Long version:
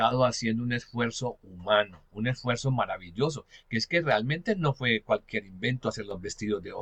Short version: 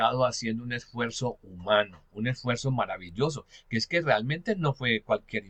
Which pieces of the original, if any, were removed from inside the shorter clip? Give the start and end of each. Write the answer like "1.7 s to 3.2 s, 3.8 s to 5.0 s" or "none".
none